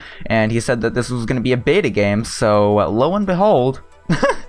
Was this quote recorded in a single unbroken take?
yes; 0 cuts

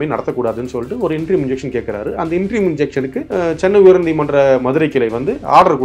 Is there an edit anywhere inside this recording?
yes; 1 cut; at 3.2 s

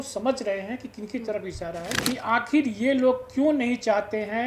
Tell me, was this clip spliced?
yes; 1 cut; at 1.9 s

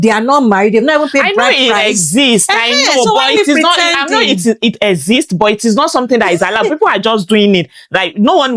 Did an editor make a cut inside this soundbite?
no; 0 cuts

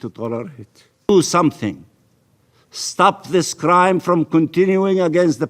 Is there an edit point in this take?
yes; 1 cut; at 1.1 s

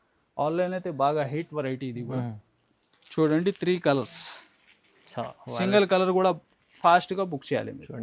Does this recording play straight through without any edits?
yes; 0 cuts

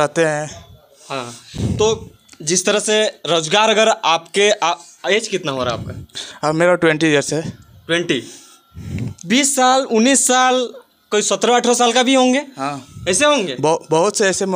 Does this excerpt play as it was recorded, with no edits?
yes; 0 cuts

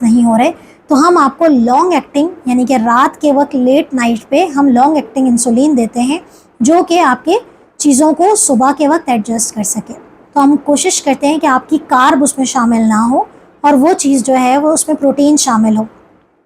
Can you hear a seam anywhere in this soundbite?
yes; 1 cut; at 10.1 s

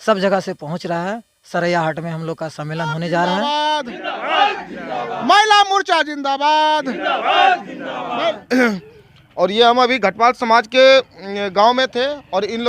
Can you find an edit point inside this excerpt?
yes; 1 cut; at 3.4 s

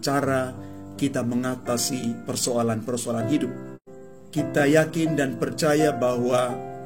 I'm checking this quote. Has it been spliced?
yes; 1 cut; at 3.8 s

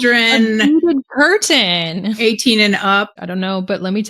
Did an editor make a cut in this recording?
yes; 1 cut; at 3.2 s

